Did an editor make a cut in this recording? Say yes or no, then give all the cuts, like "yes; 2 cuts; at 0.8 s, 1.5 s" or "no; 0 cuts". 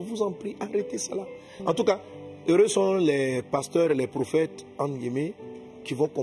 no; 0 cuts